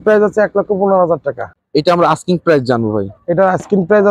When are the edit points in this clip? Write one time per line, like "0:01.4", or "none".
0:01.5